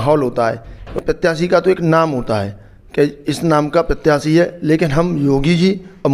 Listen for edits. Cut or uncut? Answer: cut